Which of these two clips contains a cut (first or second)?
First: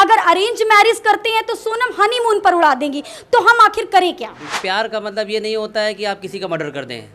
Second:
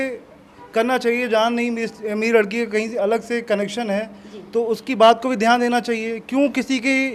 first